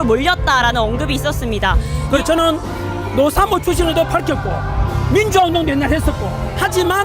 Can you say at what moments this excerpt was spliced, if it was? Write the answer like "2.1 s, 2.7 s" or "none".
2.0 s